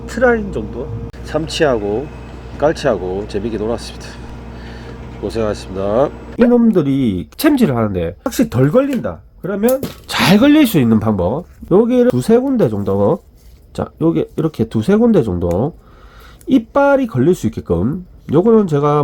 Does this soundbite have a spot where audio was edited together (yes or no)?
yes